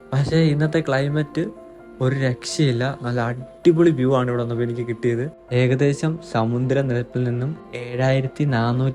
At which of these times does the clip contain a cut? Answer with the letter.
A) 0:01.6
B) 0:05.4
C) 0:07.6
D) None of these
B